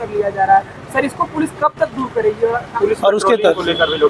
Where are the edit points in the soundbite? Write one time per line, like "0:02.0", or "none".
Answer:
0:02.7